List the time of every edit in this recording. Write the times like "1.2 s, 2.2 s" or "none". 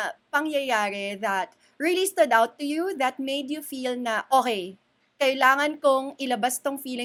none